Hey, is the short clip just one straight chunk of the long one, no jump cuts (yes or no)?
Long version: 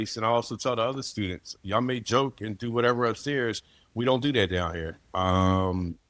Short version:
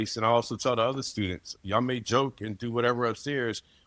yes